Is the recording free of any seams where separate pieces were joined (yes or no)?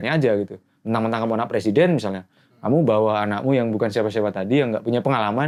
yes